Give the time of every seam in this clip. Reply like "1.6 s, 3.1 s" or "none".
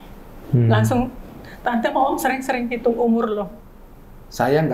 3.6 s